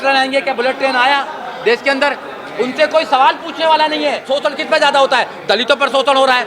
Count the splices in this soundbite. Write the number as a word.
one